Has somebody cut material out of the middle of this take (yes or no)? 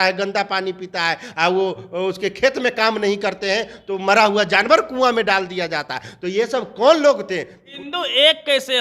yes